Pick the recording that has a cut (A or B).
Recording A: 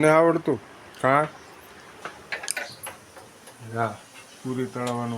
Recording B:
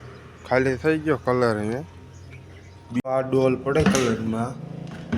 B